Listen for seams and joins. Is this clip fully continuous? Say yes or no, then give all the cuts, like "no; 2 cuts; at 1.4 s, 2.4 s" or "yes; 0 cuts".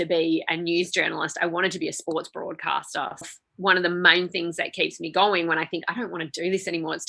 no; 1 cut; at 3.2 s